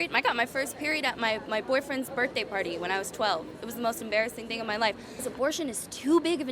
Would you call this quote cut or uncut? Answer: cut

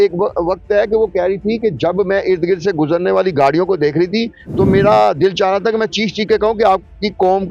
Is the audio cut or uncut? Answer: uncut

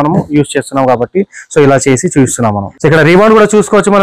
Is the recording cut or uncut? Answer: cut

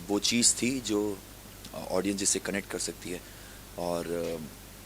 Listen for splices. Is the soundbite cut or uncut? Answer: uncut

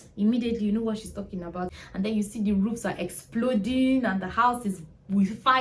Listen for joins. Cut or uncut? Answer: cut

